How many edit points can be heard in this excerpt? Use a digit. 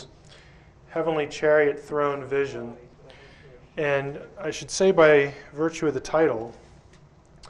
1